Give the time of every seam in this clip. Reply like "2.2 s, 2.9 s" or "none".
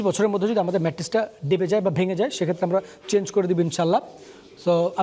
none